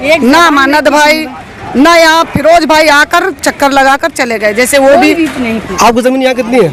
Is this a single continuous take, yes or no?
yes